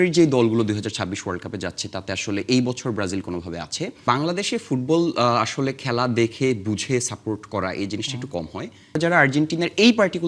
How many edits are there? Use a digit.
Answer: 2